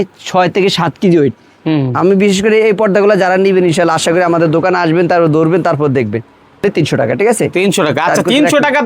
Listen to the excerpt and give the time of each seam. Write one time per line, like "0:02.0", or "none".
0:06.6